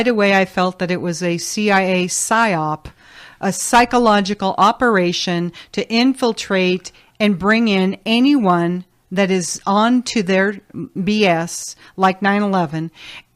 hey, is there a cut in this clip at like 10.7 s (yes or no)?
no